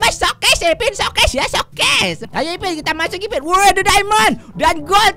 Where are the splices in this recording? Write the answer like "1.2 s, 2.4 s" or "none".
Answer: 2.2 s

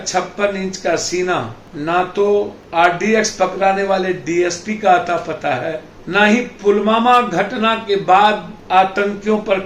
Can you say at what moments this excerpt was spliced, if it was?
1.6 s, 2.6 s, 5.9 s, 8.5 s

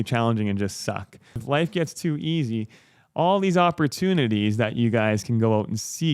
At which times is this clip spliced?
1.4 s

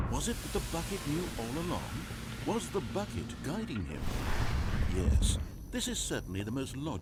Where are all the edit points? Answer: none

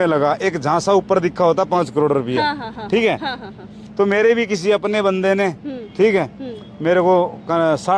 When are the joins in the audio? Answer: none

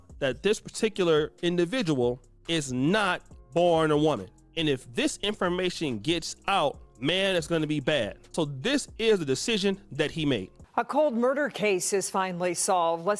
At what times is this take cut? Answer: none

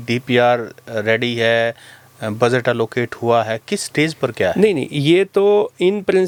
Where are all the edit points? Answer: none

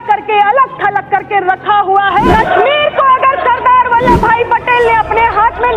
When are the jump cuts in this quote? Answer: 2.3 s

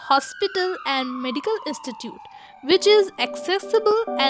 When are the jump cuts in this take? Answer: none

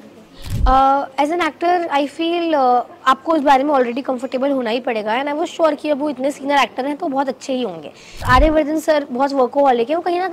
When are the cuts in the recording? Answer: 8.2 s

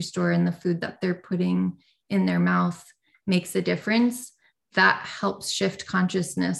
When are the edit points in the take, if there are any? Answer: none

